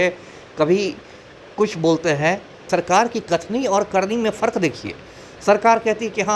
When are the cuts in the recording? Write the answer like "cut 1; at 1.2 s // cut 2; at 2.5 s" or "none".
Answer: cut 1; at 2.6 s